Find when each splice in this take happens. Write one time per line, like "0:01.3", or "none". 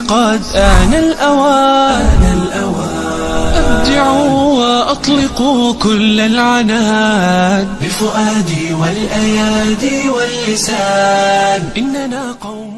none